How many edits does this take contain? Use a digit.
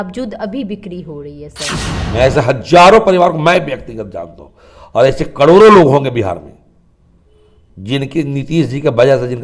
1